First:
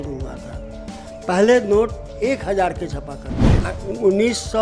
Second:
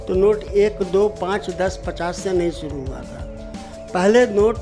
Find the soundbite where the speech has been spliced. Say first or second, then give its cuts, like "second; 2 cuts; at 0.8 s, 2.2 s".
first; 1 cut; at 3.5 s